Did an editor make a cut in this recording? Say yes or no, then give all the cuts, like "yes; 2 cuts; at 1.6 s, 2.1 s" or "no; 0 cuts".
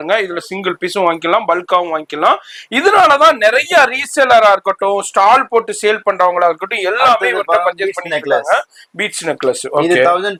no; 0 cuts